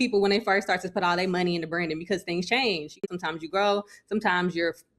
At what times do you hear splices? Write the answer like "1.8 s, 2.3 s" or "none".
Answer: 3.0 s